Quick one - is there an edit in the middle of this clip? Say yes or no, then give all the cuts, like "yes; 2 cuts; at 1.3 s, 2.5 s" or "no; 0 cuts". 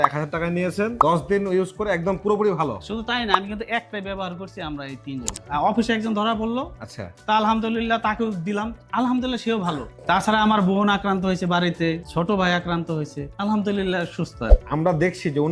yes; 3 cuts; at 1.0 s, 5.3 s, 9.9 s